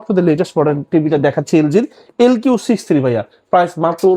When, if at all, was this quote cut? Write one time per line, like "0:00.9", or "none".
none

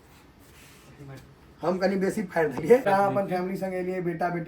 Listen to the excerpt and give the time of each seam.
0:02.9

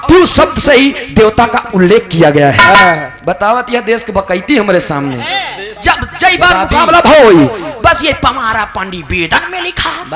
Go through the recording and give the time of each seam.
0:05.7

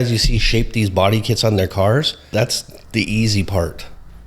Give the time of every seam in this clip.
0:02.2

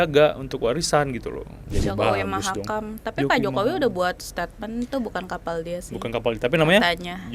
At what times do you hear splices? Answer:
0:01.7

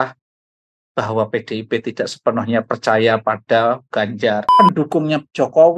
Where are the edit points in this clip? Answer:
0:04.5

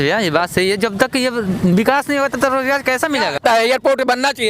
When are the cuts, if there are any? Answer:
0:03.4

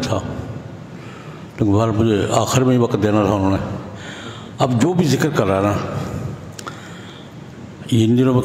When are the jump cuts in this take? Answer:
none

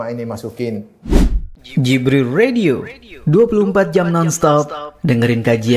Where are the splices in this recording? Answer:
0:00.9

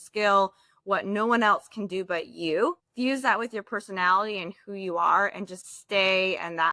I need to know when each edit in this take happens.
0:02.9

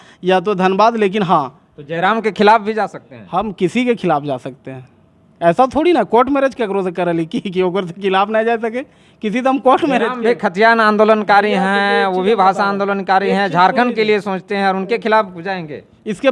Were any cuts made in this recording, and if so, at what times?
none

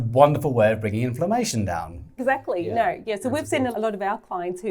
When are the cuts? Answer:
0:02.1
0:03.7

